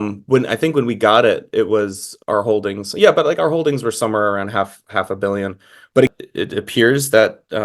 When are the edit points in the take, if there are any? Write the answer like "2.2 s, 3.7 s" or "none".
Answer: 6.1 s